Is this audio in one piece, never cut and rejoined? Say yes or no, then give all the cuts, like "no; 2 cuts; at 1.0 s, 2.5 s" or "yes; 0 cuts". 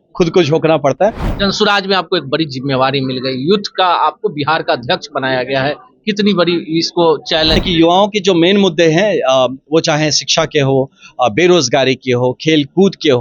no; 2 cuts; at 1.3 s, 7.6 s